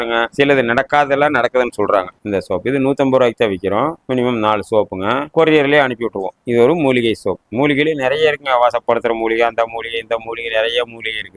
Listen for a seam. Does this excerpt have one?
no; 0 cuts

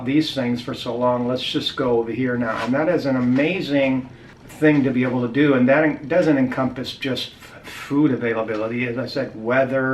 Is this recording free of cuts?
yes; 0 cuts

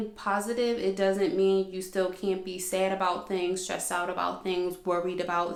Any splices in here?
no; 0 cuts

